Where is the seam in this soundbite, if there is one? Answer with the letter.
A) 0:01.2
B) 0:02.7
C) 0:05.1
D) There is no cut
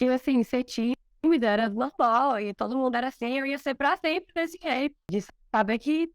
C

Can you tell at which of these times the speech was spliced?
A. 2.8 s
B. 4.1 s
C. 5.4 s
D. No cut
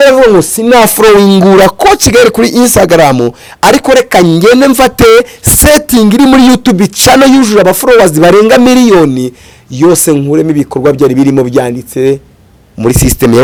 D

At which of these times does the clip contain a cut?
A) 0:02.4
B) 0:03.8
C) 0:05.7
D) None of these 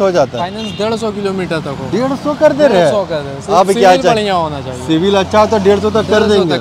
D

